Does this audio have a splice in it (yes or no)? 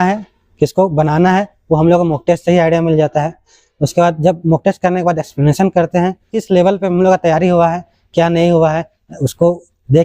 yes